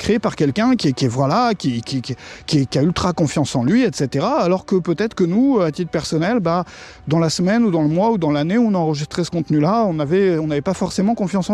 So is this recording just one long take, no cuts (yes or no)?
yes